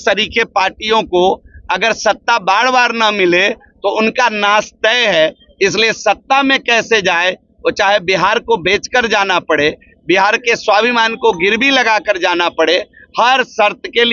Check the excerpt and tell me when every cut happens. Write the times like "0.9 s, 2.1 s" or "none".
none